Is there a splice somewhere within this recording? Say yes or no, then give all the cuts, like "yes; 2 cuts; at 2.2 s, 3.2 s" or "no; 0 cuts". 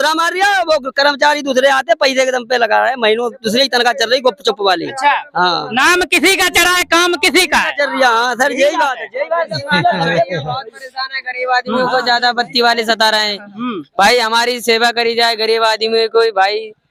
no; 0 cuts